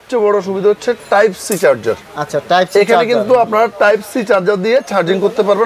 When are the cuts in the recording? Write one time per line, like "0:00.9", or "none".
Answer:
none